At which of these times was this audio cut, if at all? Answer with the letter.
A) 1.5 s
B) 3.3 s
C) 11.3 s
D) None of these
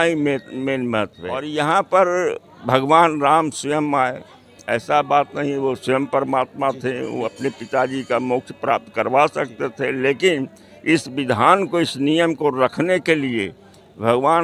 A